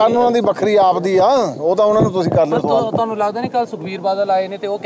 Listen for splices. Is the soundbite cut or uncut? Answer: cut